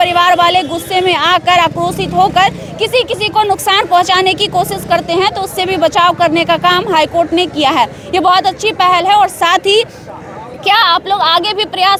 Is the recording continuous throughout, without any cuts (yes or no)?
yes